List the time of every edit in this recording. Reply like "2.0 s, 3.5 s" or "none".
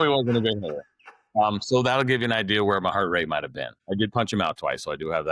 3.8 s